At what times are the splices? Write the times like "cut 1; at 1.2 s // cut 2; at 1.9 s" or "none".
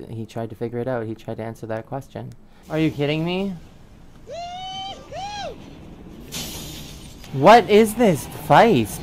cut 1; at 7.2 s